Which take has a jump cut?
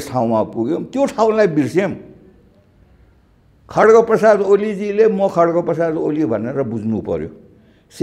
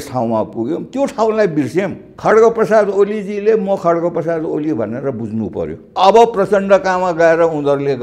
second; 2 cuts; at 2.1 s, 5.8 s

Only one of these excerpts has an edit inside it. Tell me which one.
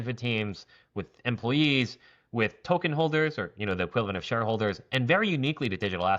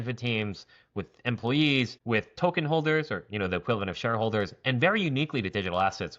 second; 1 cut; at 2.0 s

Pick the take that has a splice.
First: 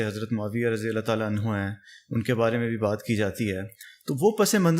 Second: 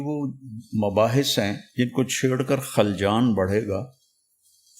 second; 1 cut; at 1.6 s

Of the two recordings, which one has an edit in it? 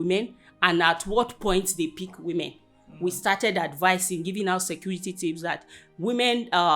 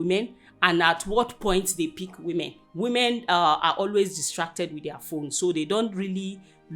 second; 1 cut; at 2.6 s

